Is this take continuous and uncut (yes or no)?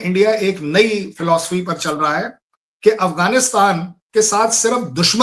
yes